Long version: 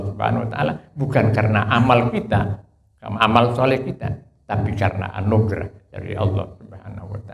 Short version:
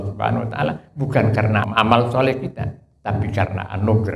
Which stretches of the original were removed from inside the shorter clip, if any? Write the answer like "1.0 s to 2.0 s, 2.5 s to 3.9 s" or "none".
1.7 s to 3.1 s